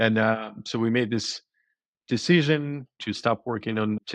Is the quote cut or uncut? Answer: cut